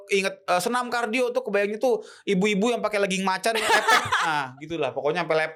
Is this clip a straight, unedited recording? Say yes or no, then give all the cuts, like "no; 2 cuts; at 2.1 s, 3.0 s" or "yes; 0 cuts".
yes; 0 cuts